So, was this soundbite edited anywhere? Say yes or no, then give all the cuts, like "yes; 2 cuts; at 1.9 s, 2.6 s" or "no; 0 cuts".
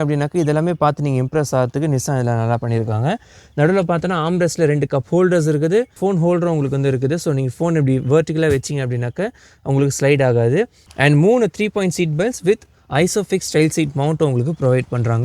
no; 0 cuts